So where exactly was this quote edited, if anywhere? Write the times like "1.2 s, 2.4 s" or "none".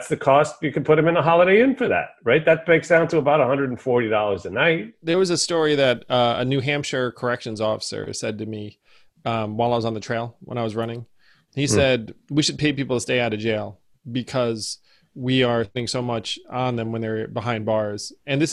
4.9 s